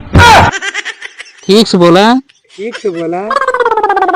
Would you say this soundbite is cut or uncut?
cut